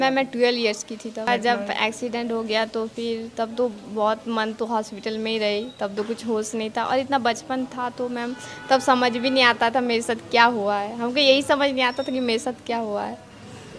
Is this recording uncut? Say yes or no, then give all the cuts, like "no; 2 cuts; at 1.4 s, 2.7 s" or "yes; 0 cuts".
no; 1 cut; at 1.3 s